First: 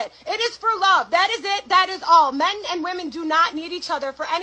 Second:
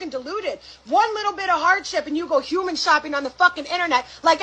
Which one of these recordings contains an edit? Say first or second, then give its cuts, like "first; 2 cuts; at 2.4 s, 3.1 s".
first; 1 cut; at 2.3 s